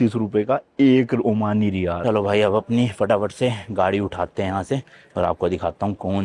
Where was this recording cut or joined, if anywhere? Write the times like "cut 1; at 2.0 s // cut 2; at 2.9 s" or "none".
cut 1; at 2.0 s